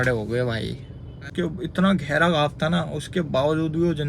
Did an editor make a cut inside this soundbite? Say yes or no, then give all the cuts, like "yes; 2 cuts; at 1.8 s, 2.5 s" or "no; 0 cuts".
yes; 1 cut; at 1.3 s